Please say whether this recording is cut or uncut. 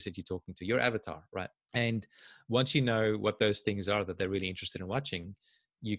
cut